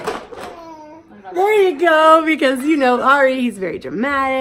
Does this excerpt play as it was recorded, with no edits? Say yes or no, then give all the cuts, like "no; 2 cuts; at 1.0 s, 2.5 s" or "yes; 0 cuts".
yes; 0 cuts